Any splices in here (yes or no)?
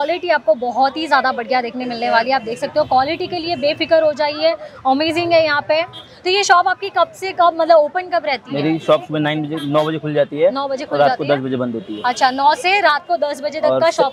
no